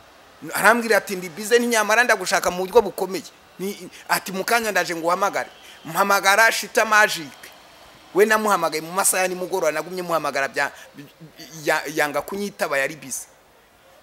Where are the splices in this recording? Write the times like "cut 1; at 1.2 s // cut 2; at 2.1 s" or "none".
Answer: none